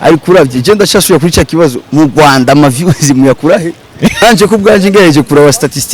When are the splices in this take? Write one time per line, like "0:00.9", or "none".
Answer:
0:04.2